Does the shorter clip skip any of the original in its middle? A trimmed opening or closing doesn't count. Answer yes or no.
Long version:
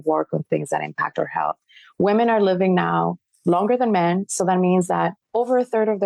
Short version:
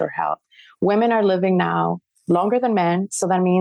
no